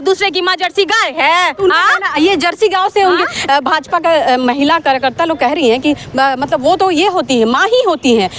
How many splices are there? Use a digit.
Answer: 0